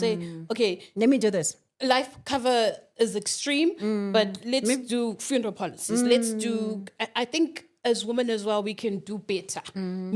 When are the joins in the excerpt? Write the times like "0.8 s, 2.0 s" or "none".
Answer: none